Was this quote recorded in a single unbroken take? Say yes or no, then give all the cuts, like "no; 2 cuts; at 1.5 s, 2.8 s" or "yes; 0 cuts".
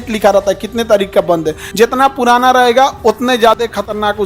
no; 1 cut; at 1.6 s